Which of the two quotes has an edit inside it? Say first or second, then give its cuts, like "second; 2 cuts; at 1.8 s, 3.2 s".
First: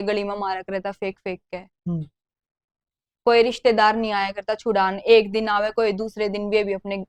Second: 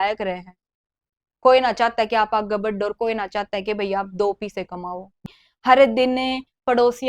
second; 1 cut; at 5.3 s